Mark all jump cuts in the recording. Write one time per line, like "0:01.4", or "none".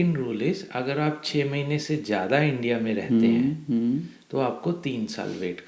none